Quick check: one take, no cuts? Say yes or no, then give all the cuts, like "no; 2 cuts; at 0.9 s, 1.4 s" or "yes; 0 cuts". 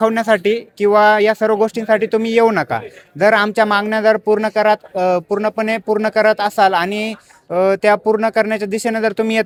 yes; 0 cuts